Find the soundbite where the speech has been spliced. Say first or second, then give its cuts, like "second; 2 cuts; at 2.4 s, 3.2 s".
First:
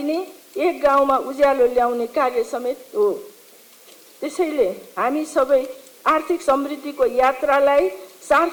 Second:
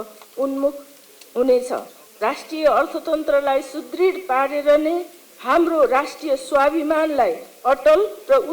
second; 1 cut; at 2.0 s